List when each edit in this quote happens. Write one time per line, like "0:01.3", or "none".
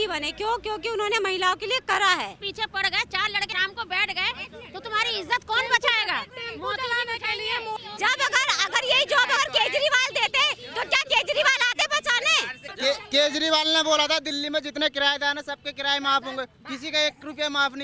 0:02.4
0:03.5
0:07.8
0:12.6

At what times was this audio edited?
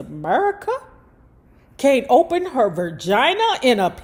none

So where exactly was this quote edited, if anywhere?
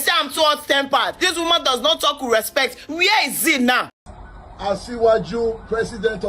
0:04.0

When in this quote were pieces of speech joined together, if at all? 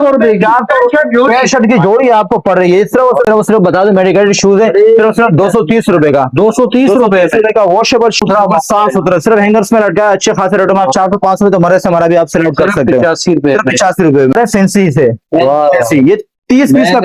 0:03.2
0:08.2
0:14.4

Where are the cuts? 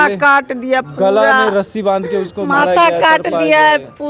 none

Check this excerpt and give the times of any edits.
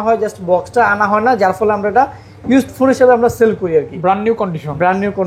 none

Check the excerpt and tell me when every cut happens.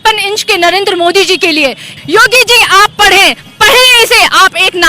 0:02.0

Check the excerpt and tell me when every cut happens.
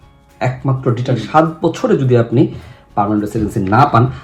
0:01.2

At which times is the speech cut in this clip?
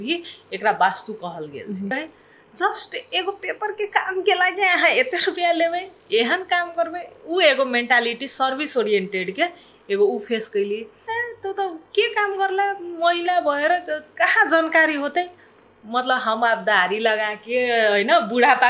0:01.9
0:11.0

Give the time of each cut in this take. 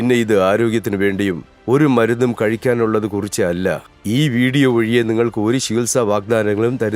0:03.9

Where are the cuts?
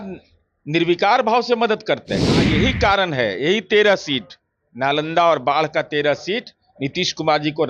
0:02.5

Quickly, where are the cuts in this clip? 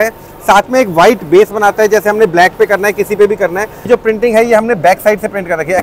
0:03.9

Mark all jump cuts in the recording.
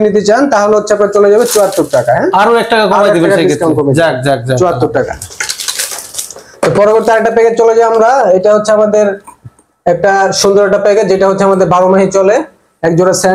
none

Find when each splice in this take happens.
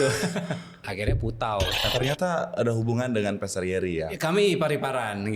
0:00.9
0:01.8

